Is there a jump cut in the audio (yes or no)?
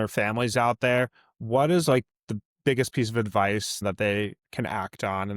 yes